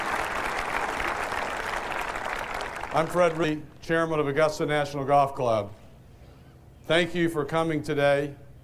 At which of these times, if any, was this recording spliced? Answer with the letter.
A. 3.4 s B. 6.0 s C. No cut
A